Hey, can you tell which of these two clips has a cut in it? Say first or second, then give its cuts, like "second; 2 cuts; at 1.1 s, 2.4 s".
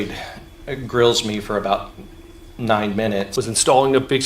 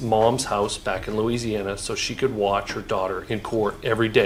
first; 1 cut; at 3.3 s